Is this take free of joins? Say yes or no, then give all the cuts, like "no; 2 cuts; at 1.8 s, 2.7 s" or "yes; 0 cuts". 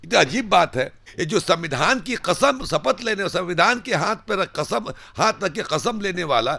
no; 1 cut; at 1.0 s